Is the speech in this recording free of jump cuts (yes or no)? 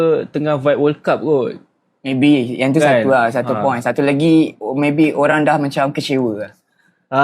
no